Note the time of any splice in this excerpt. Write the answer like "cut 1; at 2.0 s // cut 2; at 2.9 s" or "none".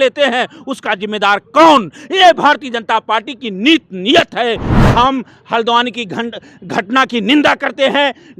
cut 1; at 4.7 s